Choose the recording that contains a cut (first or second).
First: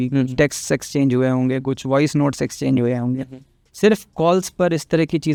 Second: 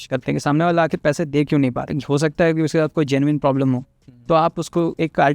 second